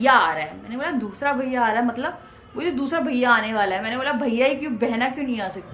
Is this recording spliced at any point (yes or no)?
no